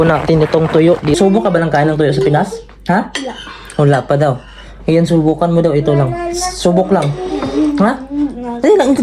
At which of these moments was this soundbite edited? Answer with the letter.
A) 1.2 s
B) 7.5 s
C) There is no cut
A